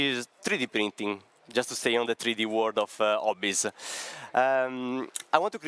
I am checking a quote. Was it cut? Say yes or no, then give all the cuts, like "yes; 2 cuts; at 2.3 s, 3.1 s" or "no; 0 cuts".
no; 0 cuts